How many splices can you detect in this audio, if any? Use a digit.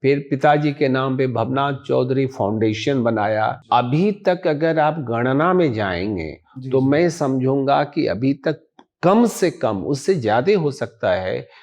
1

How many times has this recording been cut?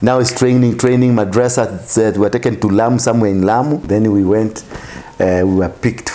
1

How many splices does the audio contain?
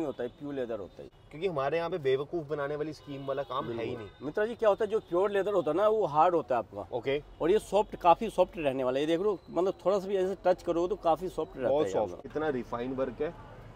2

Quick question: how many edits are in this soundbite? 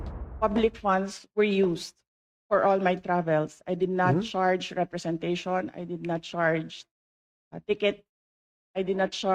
0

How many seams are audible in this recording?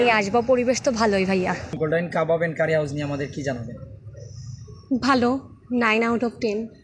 1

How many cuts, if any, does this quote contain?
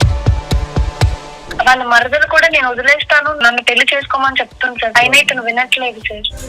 3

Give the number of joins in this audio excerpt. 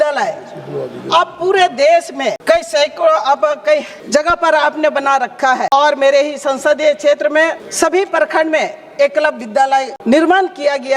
5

